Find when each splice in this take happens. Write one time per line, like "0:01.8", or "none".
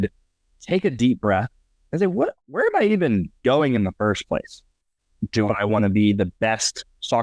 0:02.5